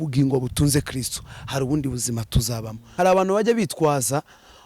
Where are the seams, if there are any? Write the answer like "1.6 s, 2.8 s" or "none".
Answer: 2.8 s